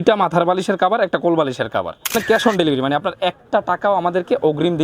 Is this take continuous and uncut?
no; 1 cut; at 2.1 s

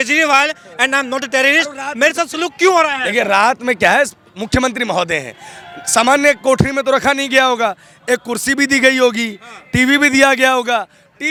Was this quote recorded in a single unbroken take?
yes; 0 cuts

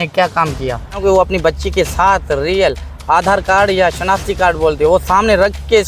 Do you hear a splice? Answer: yes; 1 cut; at 1.0 s

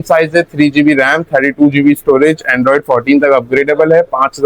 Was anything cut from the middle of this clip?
no; 0 cuts

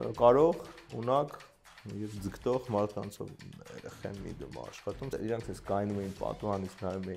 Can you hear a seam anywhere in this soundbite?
yes; 2 cuts; at 3.3 s, 5.1 s

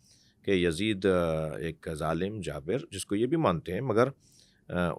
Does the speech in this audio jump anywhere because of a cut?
no; 0 cuts

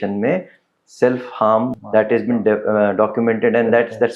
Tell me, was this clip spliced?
yes; 1 cut; at 1.8 s

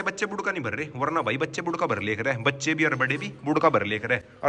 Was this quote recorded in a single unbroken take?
yes; 0 cuts

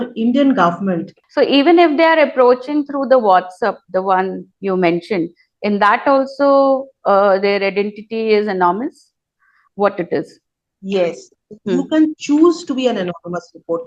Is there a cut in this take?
yes; 1 cut; at 1.2 s

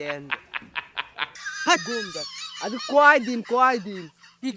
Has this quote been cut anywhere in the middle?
yes; 1 cut; at 1.3 s

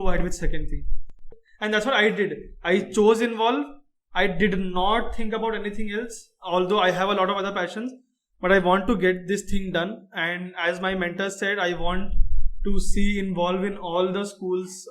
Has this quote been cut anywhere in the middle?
yes; 1 cut; at 1.2 s

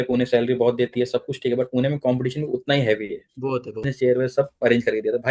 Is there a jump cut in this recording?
yes; 1 cut; at 3.9 s

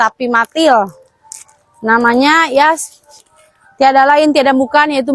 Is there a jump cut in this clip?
no; 0 cuts

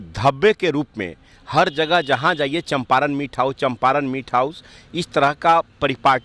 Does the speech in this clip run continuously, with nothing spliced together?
yes; 0 cuts

